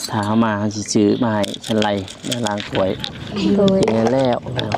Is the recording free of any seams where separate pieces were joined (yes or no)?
no